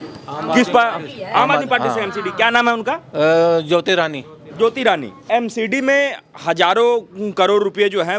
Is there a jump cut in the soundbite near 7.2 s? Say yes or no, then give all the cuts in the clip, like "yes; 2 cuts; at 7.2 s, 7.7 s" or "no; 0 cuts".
no; 1 cut; at 5.3 s